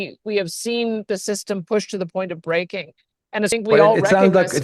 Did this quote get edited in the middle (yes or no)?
yes